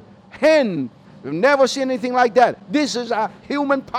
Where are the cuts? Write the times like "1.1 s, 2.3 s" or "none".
1.1 s